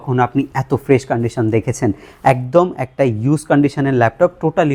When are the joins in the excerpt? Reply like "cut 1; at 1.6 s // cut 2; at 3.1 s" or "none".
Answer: none